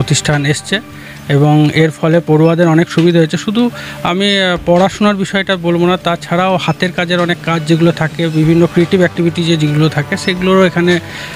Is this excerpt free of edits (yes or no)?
yes